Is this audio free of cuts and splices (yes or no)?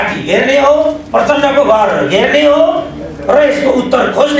no